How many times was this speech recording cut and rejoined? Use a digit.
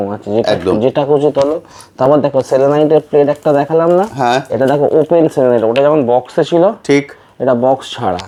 0